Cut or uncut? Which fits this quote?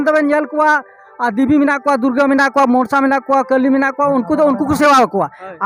uncut